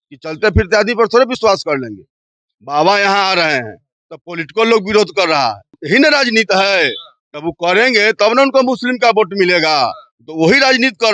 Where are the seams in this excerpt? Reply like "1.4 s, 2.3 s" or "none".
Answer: 5.7 s